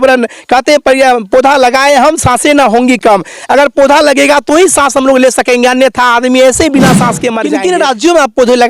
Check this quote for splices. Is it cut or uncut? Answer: cut